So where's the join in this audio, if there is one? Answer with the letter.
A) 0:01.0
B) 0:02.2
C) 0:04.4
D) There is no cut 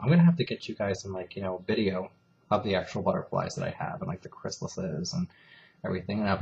A